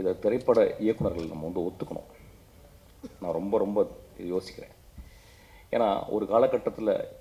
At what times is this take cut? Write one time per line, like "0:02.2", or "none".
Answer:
none